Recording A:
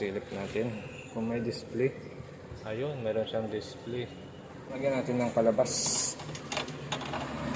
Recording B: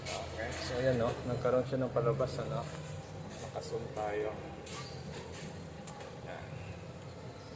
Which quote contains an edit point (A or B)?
A